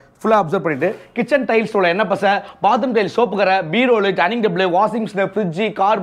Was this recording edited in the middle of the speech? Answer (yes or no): no